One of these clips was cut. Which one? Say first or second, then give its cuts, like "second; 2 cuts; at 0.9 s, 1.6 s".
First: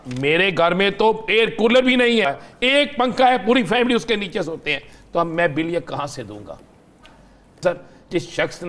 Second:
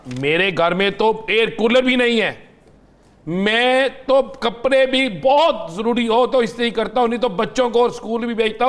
first; 2 cuts; at 2.3 s, 7.6 s